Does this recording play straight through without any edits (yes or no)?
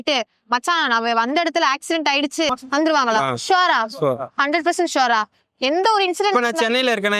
no